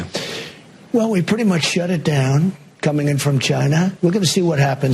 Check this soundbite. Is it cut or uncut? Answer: uncut